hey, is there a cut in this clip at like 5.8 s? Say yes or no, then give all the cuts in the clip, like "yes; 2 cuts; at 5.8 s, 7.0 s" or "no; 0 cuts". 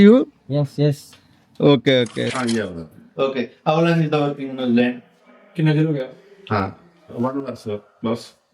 no; 1 cut; at 2.3 s